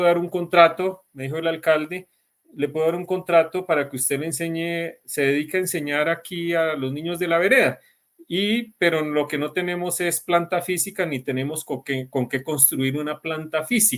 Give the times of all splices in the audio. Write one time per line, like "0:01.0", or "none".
none